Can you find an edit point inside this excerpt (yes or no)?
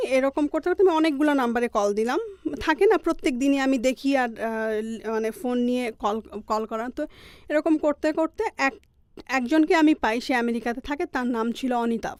no